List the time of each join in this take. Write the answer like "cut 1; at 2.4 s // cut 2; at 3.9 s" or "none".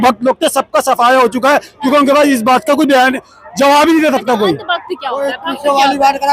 none